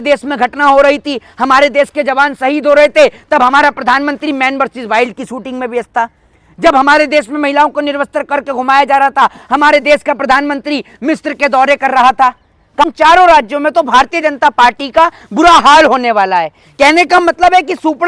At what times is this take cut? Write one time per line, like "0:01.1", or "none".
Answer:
0:12.8